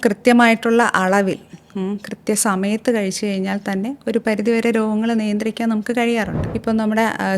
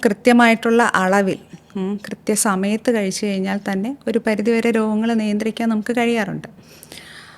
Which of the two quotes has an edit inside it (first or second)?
first